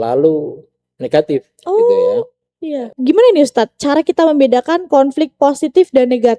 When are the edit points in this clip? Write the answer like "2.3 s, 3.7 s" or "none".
2.9 s